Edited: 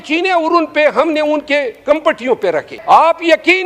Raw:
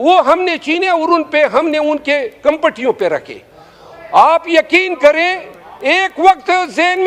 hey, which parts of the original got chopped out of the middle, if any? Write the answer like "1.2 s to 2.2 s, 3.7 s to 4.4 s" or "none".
3.3 s to 4.0 s